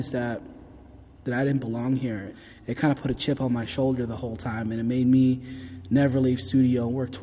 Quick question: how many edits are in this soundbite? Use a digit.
2